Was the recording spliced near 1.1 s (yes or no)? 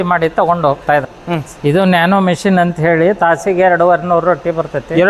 yes